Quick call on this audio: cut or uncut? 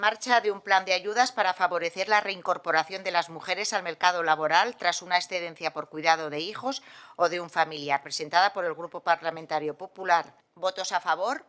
cut